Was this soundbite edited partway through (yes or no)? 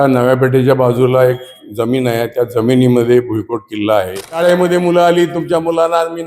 yes